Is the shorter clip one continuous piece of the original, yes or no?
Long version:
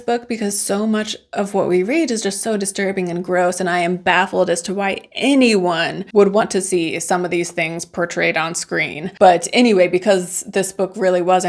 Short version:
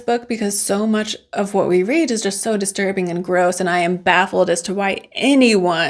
yes